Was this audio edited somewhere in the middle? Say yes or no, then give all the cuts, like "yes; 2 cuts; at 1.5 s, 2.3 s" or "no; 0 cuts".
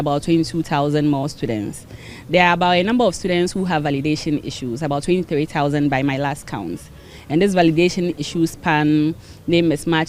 no; 0 cuts